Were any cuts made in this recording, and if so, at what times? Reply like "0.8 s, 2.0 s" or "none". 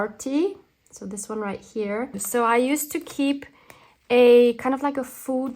2.2 s